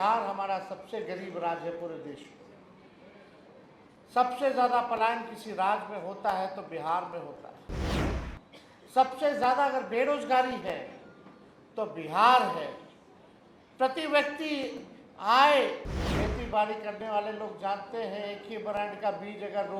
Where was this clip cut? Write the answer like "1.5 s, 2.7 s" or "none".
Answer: 15.9 s